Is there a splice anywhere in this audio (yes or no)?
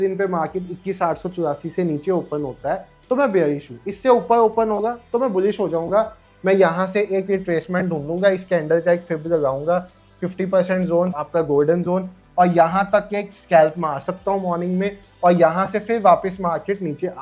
no